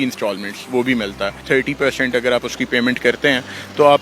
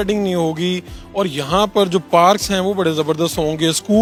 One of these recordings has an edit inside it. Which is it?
first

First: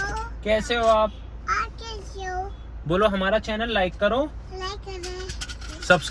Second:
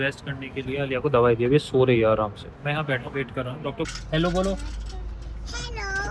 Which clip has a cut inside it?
second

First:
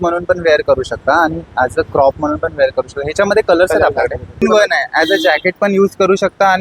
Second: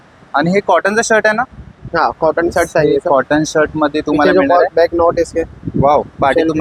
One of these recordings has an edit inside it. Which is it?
first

